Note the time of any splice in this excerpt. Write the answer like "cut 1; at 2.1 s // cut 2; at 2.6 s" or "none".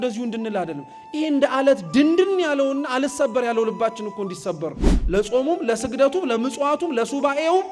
cut 1; at 4.9 s